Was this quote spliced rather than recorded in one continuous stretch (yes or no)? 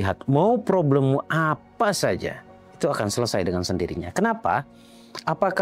no